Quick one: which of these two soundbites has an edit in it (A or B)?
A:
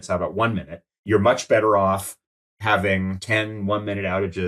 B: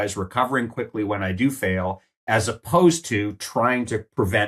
A